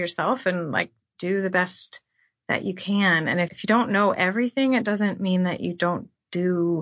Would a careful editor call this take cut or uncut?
cut